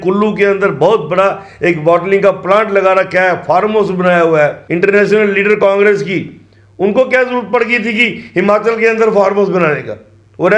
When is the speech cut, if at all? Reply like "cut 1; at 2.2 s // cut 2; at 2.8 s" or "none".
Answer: cut 1; at 4.6 s